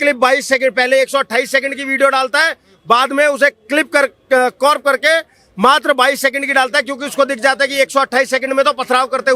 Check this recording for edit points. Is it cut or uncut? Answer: uncut